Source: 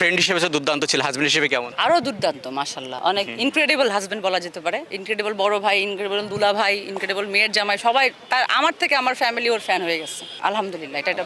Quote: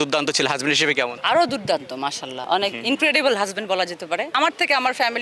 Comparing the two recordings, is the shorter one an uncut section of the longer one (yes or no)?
no